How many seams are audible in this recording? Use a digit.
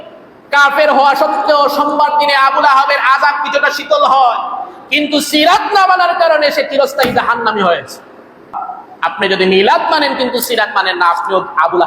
1